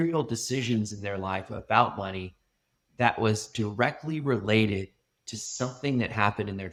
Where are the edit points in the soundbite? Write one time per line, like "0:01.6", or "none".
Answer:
none